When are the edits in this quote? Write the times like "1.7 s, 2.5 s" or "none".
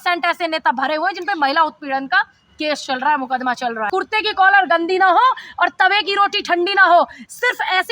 3.9 s